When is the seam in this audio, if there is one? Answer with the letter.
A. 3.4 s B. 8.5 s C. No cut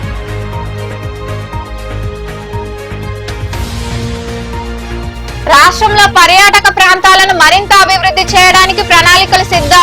A